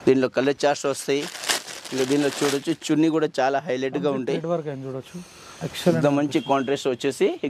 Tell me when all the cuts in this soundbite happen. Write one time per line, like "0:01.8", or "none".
none